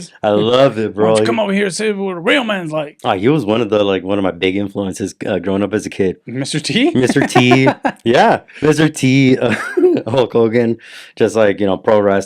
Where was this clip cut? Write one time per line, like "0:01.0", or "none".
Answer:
none